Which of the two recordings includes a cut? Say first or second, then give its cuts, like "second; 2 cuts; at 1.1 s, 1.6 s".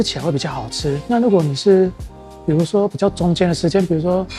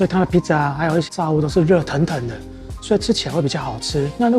second; 1 cut; at 1.1 s